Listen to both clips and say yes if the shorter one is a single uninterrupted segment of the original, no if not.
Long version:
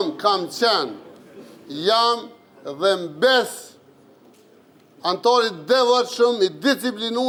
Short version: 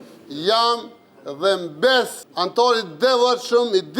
no